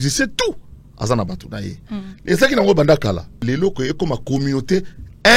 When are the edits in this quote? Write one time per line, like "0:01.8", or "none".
0:03.4